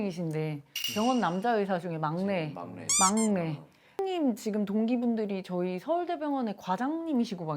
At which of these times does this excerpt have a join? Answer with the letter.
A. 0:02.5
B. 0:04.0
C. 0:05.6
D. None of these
B